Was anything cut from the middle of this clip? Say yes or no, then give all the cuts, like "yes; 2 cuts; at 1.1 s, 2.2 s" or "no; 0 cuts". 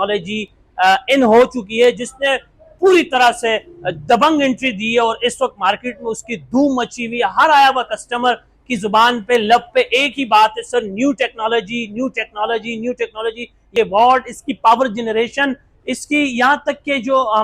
yes; 1 cut; at 13.6 s